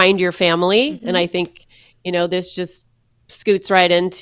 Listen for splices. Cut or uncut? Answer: uncut